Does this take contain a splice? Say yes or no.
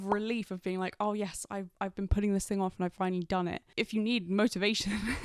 no